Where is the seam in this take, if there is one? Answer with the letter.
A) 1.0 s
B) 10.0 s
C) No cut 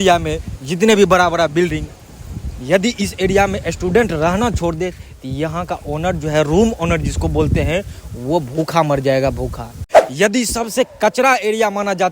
B